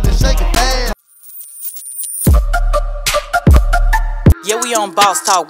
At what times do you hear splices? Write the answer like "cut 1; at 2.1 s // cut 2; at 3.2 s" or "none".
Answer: cut 1; at 1.1 s